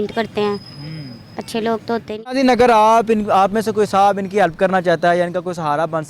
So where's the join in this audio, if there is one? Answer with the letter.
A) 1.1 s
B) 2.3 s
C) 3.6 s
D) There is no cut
B